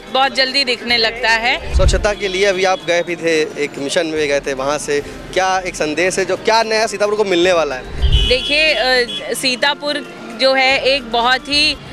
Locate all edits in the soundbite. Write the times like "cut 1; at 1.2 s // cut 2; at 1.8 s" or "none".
cut 1; at 1.7 s // cut 2; at 8.1 s